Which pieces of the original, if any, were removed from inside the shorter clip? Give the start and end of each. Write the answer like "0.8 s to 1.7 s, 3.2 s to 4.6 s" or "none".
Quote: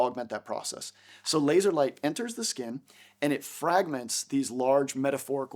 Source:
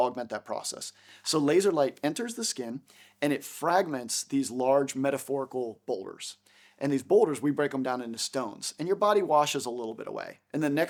none